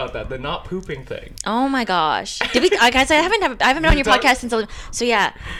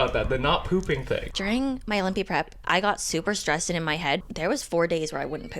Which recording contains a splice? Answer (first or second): second